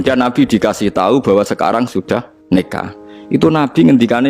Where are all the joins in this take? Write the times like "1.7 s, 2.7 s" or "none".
2.3 s